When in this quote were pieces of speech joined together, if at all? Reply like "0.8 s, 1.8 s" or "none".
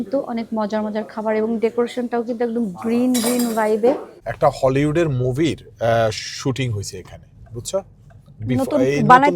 4.2 s